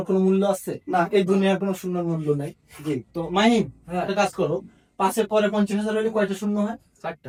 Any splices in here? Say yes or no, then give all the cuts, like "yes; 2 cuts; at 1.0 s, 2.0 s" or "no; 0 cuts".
no; 0 cuts